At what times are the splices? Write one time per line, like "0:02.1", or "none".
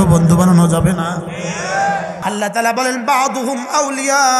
0:02.2